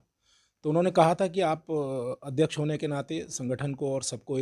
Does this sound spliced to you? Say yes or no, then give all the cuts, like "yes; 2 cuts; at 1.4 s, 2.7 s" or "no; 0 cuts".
no; 0 cuts